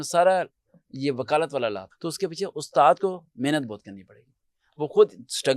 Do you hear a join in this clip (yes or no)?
yes